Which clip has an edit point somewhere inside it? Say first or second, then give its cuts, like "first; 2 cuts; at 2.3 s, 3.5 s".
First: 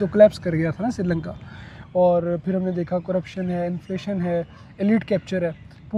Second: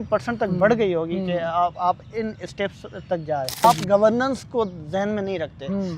second; 1 cut; at 3.6 s